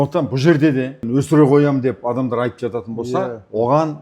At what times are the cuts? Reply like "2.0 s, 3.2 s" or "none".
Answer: 1.0 s